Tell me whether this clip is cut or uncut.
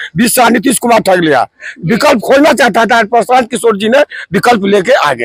uncut